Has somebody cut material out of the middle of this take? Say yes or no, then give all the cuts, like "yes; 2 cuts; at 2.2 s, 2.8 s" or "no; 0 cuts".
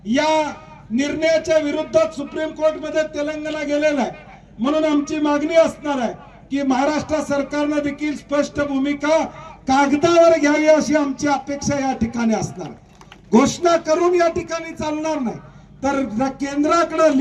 no; 0 cuts